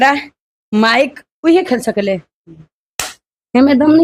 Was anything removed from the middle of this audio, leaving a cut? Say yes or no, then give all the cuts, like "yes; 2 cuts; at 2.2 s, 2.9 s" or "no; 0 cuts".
no; 0 cuts